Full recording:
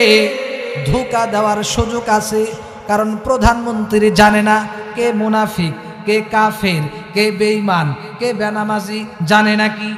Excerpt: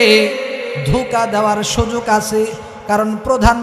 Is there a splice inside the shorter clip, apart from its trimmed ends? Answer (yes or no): no